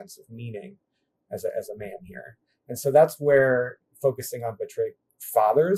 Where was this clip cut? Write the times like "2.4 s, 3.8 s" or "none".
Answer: none